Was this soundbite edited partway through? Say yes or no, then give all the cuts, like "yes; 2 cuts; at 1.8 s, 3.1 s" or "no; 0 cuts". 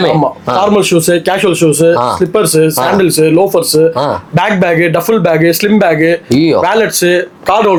no; 0 cuts